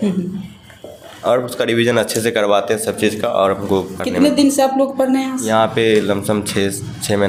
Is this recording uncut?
yes; 0 cuts

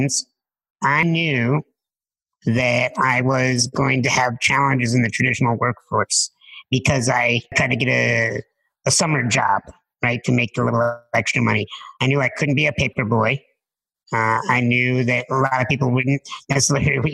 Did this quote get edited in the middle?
yes; 2 cuts; at 1.0 s, 7.5 s

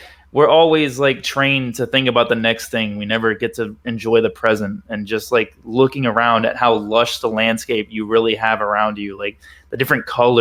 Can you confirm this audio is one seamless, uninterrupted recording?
yes; 0 cuts

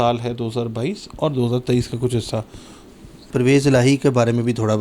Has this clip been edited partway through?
yes; 1 cut; at 3.2 s

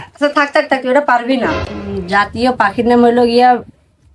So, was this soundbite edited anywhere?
yes; 1 cut; at 1.5 s

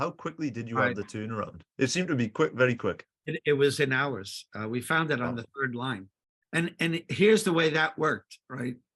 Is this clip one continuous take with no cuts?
yes; 0 cuts

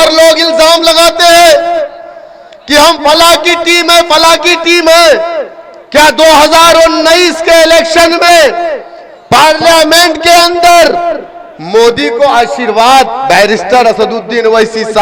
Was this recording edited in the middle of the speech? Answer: no; 0 cuts

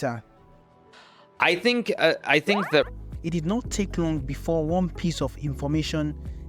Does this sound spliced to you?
yes; 1 cut; at 2.9 s

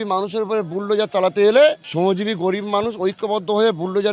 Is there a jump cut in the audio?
no; 0 cuts

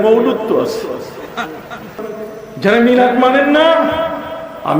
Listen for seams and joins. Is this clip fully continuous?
no; 1 cut; at 2.1 s

